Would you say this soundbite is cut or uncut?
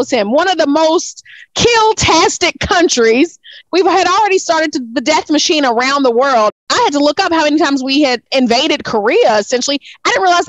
cut